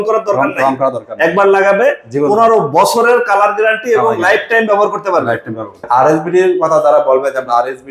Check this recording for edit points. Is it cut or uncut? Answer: cut